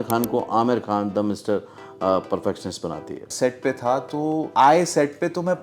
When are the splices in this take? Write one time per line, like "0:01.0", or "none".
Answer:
0:03.3
0:04.5